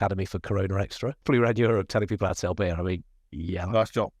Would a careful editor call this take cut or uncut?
cut